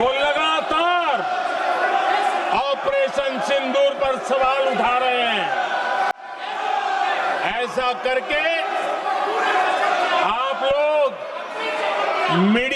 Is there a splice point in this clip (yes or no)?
no